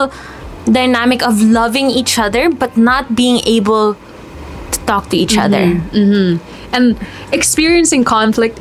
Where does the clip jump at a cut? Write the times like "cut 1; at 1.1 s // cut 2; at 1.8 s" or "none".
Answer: none